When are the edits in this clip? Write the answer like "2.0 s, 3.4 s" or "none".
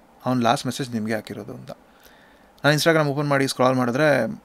none